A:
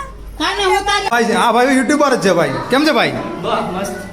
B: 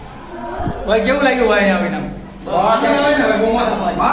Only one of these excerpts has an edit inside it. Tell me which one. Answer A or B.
A